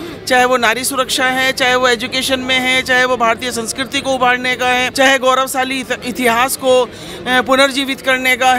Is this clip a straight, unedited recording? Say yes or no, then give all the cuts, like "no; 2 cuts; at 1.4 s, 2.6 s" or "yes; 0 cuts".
yes; 0 cuts